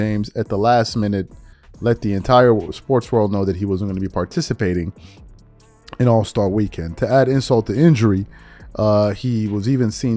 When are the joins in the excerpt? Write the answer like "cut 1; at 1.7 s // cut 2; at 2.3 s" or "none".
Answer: none